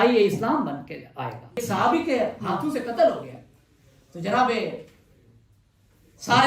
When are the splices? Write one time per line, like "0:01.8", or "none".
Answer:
0:01.6